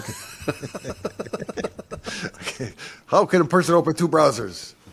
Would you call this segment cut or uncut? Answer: uncut